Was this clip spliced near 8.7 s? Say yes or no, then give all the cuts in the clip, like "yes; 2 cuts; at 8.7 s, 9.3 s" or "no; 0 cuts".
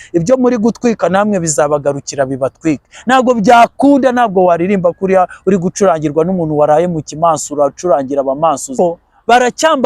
yes; 1 cut; at 8.7 s